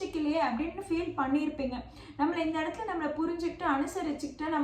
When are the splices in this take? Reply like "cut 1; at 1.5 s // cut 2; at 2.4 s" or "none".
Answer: none